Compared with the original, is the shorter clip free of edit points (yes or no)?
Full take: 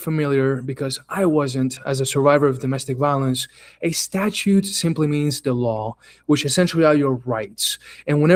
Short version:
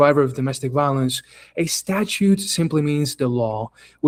yes